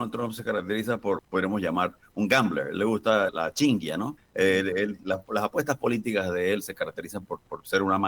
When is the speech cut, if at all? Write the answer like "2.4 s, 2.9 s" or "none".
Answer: 1.2 s, 3.3 s, 4.2 s